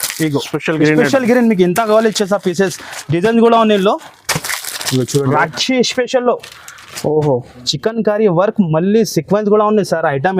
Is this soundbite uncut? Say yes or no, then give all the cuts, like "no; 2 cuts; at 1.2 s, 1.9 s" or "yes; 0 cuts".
no; 1 cut; at 5.3 s